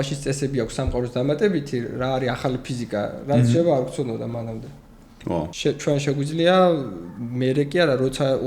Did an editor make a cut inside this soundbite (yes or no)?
yes